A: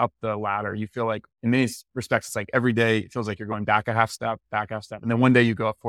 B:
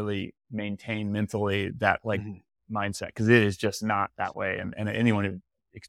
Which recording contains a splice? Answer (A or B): A